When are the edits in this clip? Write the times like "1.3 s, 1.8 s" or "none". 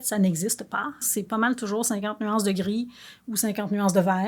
1.0 s